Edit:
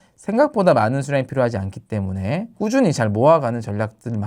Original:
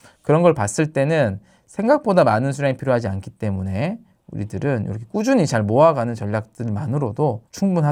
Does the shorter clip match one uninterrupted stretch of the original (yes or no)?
no